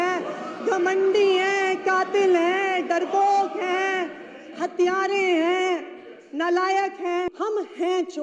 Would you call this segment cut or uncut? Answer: cut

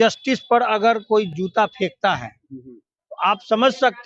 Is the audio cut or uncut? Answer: uncut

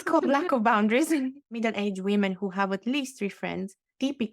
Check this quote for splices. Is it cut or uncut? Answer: cut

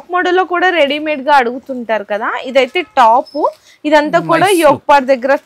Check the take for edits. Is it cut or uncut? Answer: uncut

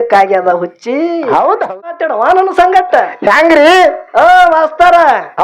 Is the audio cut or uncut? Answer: cut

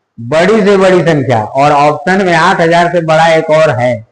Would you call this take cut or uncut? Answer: uncut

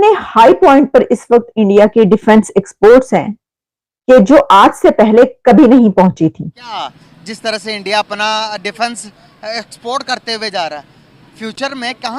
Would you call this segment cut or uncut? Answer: cut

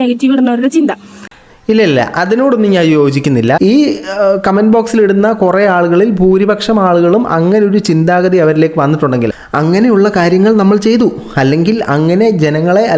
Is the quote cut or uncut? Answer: cut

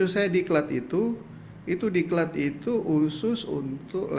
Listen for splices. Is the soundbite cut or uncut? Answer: uncut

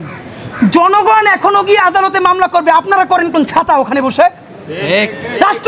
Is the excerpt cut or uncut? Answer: uncut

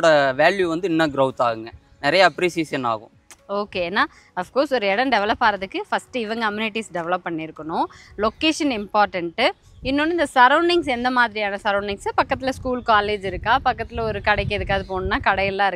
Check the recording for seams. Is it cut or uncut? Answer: uncut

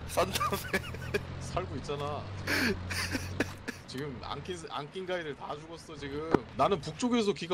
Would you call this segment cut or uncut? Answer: cut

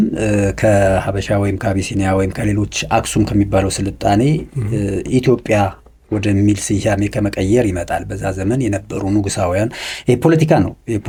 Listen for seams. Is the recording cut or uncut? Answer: uncut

